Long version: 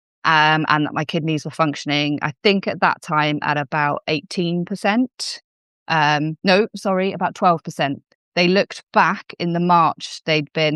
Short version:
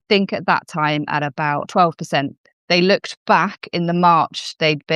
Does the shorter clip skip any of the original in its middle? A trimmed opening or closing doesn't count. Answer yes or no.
yes